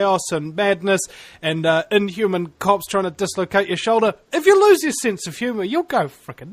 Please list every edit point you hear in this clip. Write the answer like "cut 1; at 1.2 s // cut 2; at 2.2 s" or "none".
none